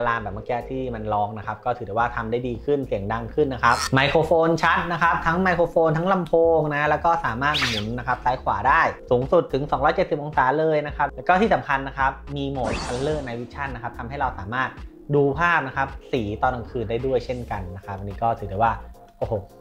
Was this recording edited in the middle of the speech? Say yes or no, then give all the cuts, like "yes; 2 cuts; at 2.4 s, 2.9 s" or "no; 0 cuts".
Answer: no; 0 cuts